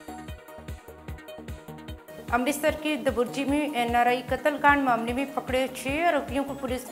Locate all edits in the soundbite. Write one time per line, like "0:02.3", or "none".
0:02.3